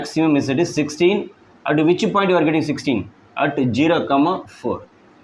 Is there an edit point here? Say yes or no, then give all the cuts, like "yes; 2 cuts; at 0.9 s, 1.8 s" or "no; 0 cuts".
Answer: no; 0 cuts